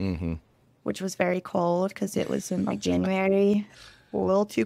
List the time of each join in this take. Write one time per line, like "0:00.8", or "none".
0:03.7